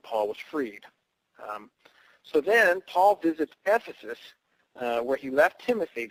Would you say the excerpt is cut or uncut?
uncut